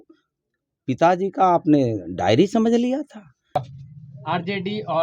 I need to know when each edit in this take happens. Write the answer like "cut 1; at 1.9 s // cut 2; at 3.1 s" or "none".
cut 1; at 3.6 s